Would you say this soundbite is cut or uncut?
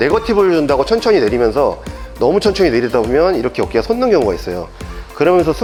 uncut